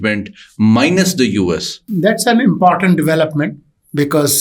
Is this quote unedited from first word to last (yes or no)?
no